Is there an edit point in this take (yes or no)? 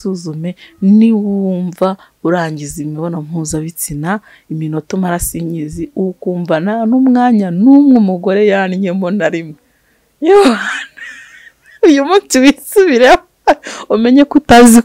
no